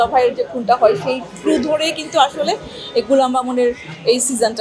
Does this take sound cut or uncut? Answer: uncut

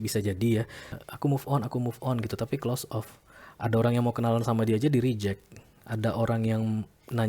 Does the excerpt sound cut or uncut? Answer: cut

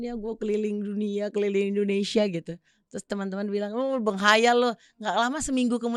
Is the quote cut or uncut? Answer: uncut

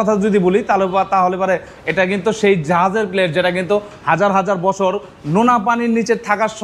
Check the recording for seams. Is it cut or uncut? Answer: uncut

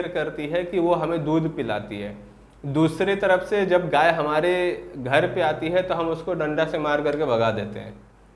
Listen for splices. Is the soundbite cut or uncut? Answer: uncut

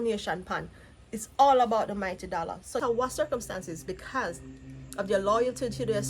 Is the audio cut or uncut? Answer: cut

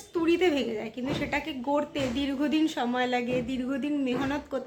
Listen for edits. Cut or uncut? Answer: uncut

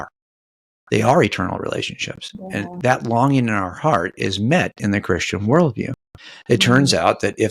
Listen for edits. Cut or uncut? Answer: uncut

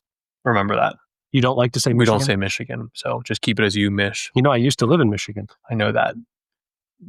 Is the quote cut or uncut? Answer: uncut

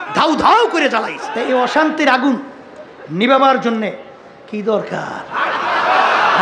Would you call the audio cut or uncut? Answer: cut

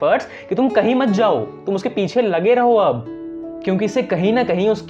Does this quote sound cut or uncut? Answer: uncut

